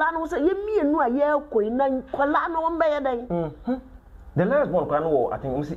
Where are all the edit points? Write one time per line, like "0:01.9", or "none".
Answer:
none